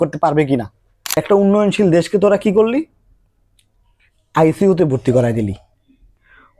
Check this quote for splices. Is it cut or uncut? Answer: cut